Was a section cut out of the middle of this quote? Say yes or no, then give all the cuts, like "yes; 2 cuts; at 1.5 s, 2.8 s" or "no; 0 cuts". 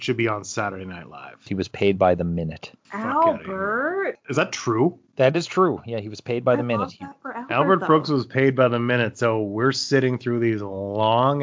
yes; 2 cuts; at 1.5 s, 4.2 s